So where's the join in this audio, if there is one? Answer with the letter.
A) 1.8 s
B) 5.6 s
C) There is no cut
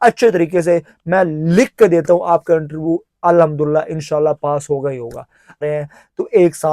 B